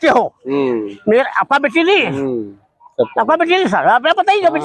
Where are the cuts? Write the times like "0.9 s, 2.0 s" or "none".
none